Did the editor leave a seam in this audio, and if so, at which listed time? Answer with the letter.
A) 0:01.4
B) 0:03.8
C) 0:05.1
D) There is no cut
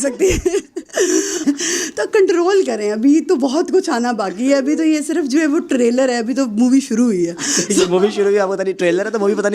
A